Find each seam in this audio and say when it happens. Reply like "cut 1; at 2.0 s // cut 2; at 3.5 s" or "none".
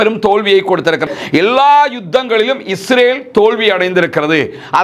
cut 1; at 1.0 s